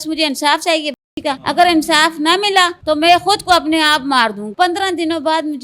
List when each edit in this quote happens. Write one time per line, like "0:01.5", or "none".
0:01.4
0:02.8
0:04.5